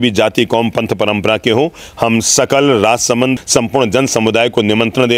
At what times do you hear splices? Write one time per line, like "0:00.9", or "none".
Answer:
0:03.3